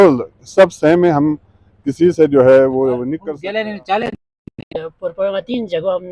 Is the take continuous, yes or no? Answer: no